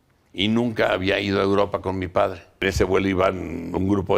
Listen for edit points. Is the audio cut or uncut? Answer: cut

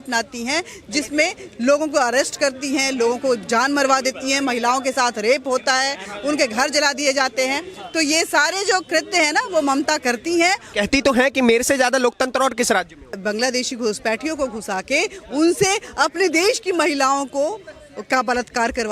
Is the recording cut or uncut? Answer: cut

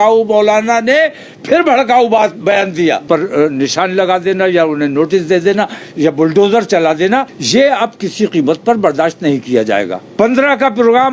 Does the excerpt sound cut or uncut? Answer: cut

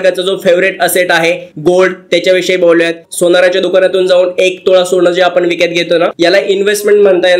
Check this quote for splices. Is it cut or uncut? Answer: cut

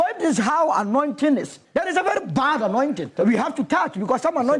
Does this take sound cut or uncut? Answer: cut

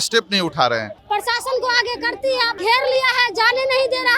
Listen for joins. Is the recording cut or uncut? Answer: cut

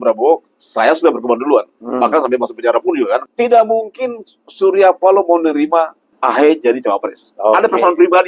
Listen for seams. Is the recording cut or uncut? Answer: cut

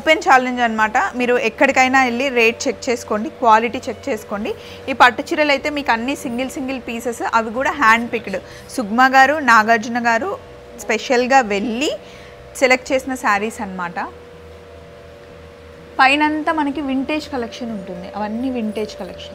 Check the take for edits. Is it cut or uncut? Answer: uncut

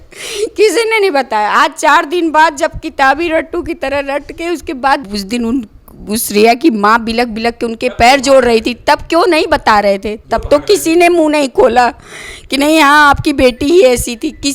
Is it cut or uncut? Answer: cut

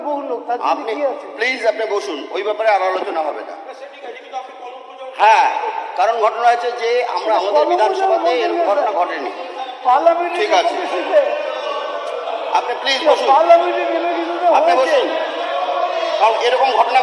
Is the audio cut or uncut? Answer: uncut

